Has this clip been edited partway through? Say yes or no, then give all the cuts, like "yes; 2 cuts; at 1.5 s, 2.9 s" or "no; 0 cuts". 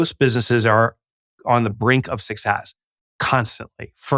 no; 0 cuts